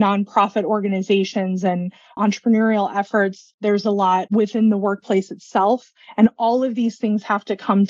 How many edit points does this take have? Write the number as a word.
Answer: three